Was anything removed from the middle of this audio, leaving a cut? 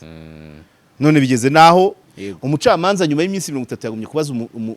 yes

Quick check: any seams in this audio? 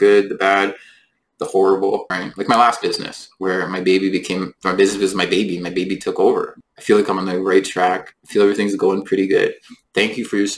yes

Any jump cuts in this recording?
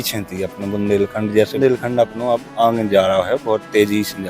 yes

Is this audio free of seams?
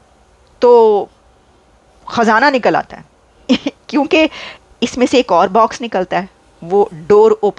yes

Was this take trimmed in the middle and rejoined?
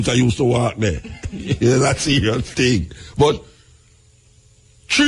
no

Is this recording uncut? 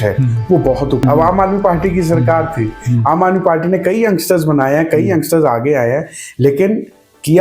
no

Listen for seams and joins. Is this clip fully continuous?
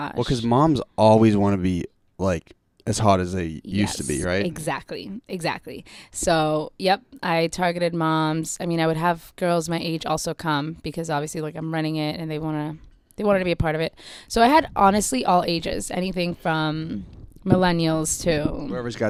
yes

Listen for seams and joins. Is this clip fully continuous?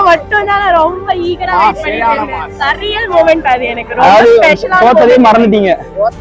yes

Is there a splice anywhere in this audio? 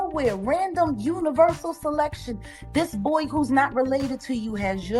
no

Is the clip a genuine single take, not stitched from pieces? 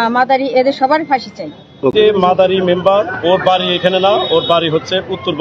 no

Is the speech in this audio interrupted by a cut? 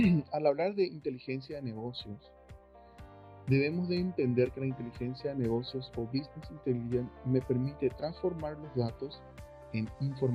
no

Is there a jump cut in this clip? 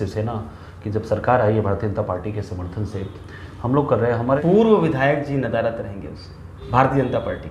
yes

